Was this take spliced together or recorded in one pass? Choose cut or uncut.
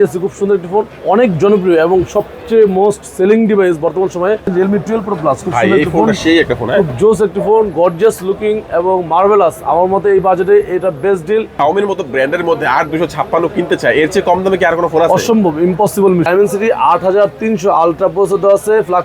cut